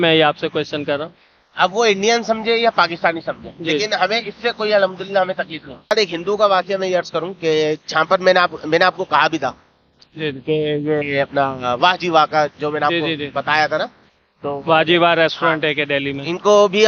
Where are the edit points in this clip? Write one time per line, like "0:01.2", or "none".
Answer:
0:05.9